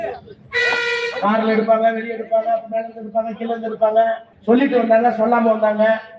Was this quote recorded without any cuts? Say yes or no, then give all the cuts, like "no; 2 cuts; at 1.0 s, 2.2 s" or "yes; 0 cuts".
no; 1 cut; at 4.3 s